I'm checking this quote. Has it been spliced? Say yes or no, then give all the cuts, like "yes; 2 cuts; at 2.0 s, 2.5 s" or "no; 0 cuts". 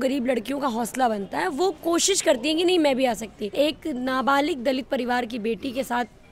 yes; 1 cut; at 3.5 s